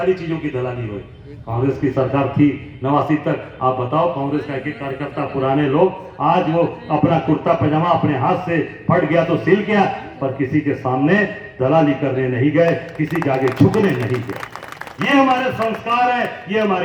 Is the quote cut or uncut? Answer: uncut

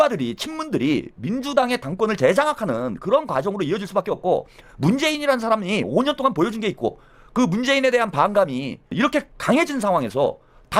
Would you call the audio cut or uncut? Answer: uncut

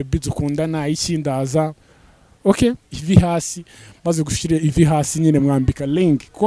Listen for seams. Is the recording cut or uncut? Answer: cut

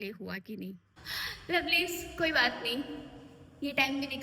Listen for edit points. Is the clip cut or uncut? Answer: cut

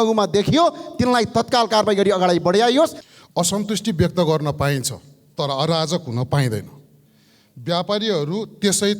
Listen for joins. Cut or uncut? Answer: cut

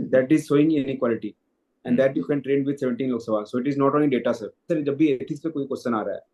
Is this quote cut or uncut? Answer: cut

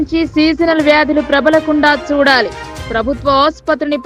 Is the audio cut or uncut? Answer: uncut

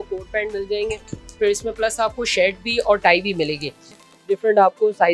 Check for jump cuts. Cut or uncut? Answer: cut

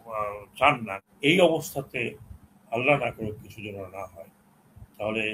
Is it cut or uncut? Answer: cut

